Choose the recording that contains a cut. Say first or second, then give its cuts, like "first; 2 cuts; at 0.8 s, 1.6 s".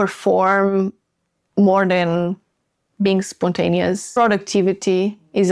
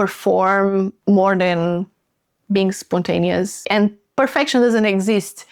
second; 2 cuts; at 0.9 s, 3.6 s